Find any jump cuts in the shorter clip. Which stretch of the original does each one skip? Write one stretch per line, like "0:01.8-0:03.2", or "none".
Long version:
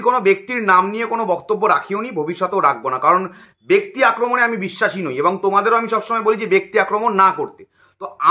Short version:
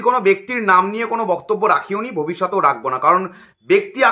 none